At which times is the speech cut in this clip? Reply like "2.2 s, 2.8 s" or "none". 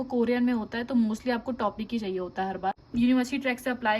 2.8 s